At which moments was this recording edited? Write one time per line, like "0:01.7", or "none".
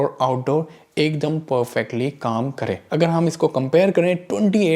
0:02.8